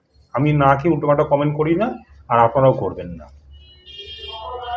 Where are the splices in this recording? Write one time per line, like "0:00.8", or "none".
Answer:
none